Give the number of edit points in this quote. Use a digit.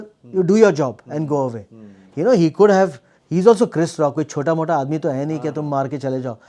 0